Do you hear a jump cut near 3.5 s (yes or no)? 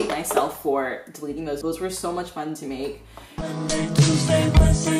yes